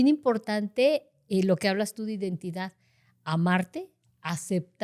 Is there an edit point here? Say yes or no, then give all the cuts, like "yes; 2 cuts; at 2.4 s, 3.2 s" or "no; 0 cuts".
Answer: no; 0 cuts